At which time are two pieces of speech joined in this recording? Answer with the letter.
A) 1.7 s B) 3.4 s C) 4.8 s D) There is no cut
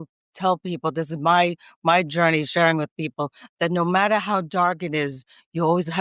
D